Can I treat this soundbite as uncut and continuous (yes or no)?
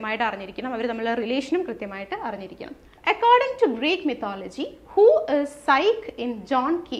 no